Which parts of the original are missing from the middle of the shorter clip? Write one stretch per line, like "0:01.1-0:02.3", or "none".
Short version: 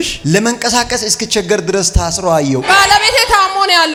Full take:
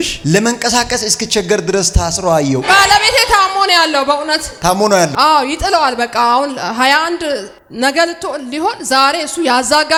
none